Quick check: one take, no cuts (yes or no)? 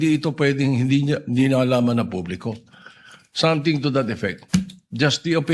no